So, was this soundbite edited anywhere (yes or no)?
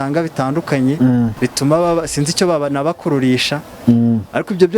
yes